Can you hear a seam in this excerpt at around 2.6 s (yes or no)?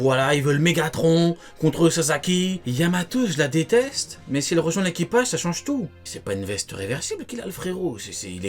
yes